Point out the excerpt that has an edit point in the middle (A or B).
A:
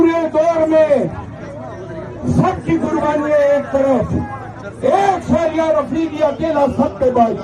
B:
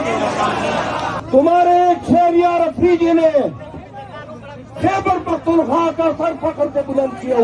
B